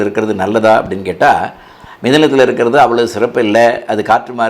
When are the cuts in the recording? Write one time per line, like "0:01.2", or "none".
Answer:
none